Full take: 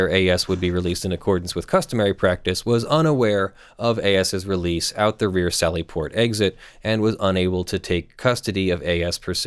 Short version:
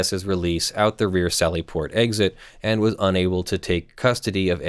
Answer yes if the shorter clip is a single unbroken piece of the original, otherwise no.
yes